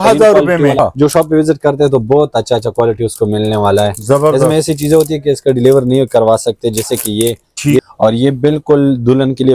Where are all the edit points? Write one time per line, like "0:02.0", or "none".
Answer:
0:00.8
0:07.8